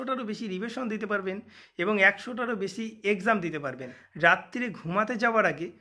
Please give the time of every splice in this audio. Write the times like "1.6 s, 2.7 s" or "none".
4.0 s